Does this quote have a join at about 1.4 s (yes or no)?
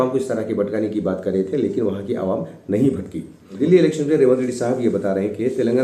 no